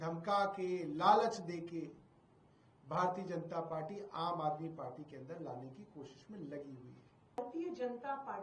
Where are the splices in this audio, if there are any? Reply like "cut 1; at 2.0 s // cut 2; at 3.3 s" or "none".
cut 1; at 7.4 s